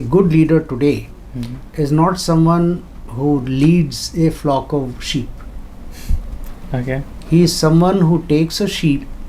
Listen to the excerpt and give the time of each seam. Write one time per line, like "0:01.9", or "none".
none